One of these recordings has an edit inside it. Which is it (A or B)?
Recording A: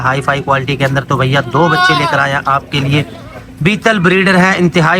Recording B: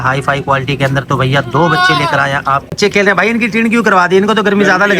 B